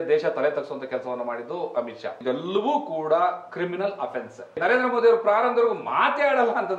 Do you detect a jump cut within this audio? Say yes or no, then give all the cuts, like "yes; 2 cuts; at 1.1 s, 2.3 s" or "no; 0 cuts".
yes; 2 cuts; at 2.2 s, 4.6 s